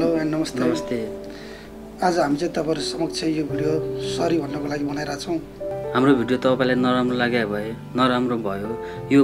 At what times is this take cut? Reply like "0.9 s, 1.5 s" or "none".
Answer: 5.7 s